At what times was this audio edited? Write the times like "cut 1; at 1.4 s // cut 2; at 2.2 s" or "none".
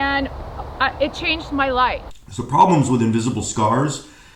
cut 1; at 2.1 s

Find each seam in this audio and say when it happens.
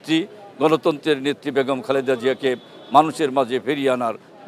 none

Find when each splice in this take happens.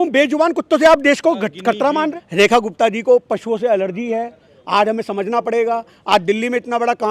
cut 1; at 2.1 s

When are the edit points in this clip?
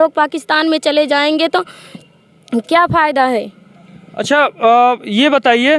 none

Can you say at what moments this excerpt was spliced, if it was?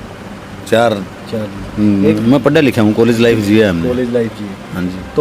cut 1; at 2.2 s

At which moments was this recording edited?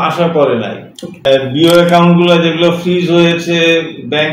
cut 1; at 1.3 s

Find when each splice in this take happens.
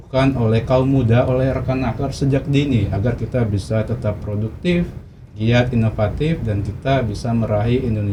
none

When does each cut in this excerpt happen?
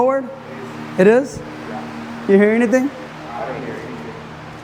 none

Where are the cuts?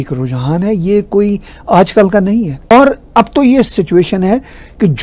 none

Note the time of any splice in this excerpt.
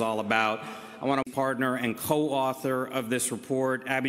none

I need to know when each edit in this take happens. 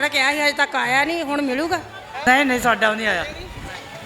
cut 1; at 2.3 s

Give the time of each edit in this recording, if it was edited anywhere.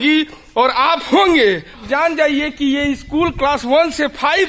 cut 1; at 1.8 s

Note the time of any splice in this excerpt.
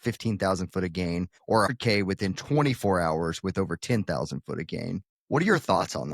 cut 1; at 1.7 s // cut 2; at 5.1 s

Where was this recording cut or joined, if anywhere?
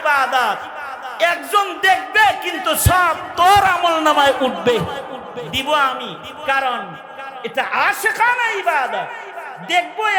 none

